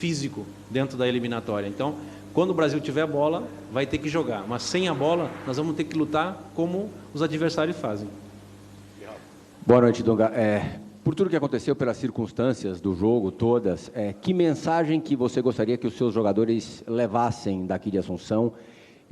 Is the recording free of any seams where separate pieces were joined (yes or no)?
no